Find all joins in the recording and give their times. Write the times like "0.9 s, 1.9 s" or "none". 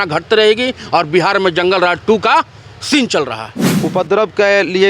3.6 s

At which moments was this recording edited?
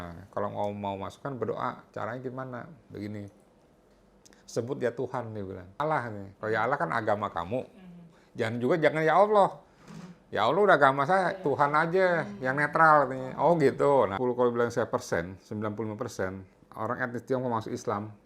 5.8 s, 14.1 s

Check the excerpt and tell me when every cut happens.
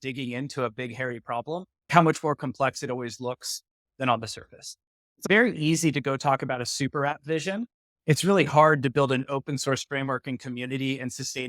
1.9 s, 5.3 s

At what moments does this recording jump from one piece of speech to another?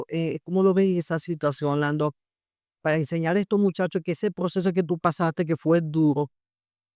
none

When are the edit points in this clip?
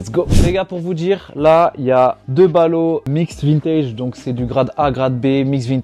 none

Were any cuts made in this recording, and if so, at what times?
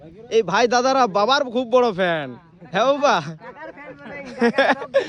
none

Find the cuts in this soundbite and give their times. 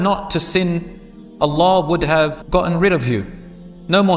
2.4 s

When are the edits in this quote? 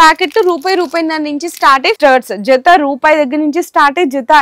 2.0 s

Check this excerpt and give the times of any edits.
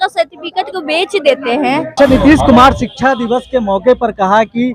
1.9 s

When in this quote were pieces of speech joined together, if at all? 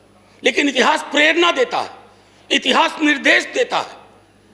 none

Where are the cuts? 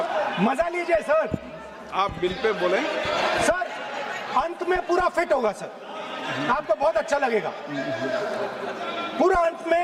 none

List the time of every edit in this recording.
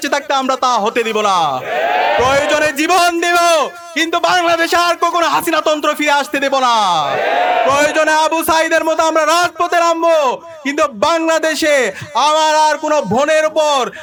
none

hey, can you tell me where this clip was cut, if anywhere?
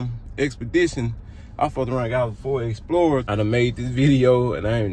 3.2 s

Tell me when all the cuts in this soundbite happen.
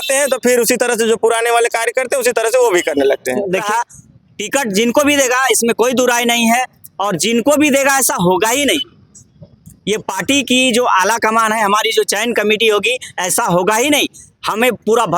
3.6 s

